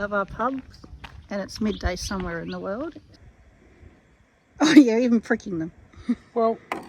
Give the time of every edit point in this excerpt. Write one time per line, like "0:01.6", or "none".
0:03.1